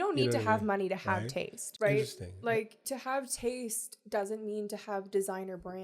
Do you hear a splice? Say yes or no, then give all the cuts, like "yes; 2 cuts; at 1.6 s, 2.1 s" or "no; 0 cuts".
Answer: yes; 1 cut; at 1.6 s